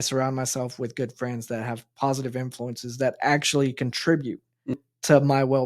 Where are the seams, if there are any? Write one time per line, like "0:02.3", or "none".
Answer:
0:04.7